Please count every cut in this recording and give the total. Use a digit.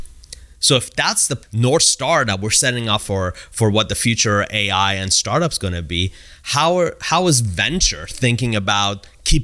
1